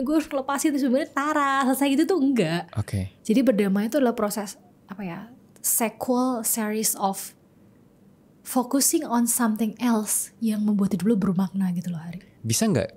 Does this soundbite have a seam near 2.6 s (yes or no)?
no